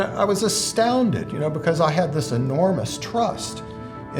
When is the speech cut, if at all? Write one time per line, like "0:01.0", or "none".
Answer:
none